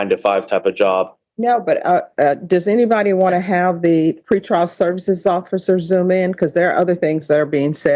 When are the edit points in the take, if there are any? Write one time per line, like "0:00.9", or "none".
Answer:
none